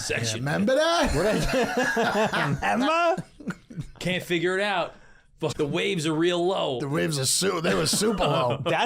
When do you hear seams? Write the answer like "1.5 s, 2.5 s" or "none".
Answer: 5.5 s